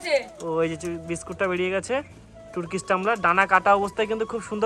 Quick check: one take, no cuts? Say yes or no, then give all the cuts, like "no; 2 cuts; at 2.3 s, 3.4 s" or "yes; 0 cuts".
yes; 0 cuts